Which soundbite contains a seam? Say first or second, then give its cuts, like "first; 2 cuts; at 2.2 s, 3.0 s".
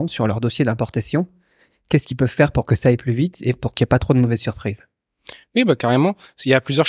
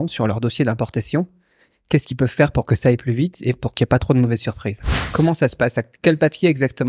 second; 1 cut; at 5.0 s